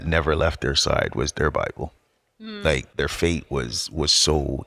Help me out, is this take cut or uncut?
cut